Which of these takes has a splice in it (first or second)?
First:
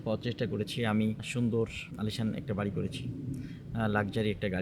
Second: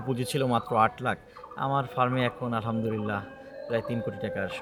first